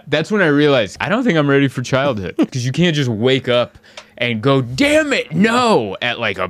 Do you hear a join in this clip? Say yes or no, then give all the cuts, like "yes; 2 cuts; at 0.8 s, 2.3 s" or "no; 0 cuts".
yes; 2 cuts; at 1.0 s, 2.5 s